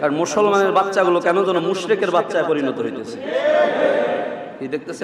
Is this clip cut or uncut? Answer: uncut